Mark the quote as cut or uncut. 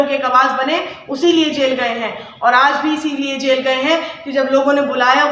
uncut